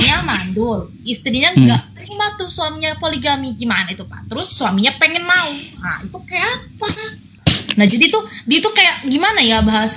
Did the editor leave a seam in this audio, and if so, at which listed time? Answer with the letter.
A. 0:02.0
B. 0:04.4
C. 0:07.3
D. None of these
C